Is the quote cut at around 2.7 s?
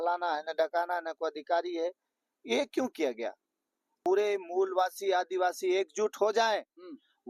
no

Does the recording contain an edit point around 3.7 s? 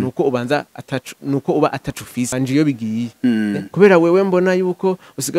no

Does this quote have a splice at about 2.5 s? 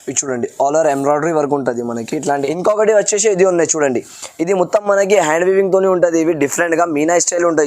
yes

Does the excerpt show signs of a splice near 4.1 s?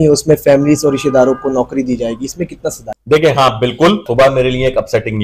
yes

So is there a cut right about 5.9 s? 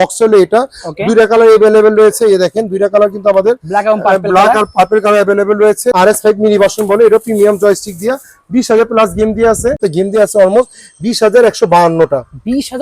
yes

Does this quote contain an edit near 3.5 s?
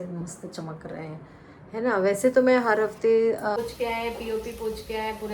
yes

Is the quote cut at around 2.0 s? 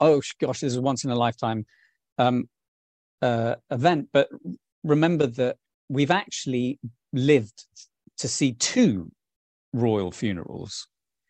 no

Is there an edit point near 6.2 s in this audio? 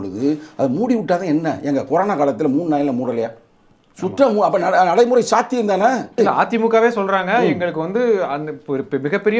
yes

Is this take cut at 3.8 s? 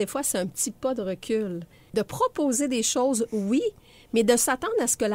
no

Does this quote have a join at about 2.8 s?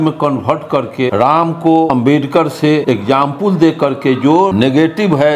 yes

